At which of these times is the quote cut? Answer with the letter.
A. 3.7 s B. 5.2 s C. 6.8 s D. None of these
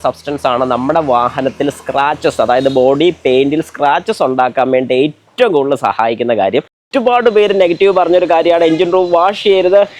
C